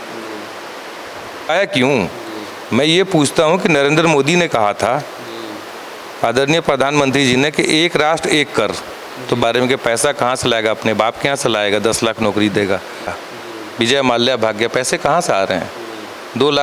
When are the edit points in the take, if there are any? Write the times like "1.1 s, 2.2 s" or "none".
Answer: 1.5 s, 9.4 s, 13.1 s